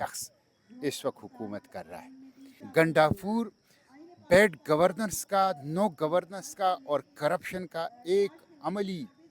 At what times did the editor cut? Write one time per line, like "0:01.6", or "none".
0:02.5